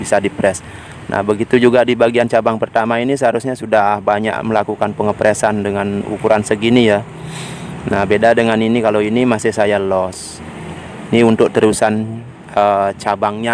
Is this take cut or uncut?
uncut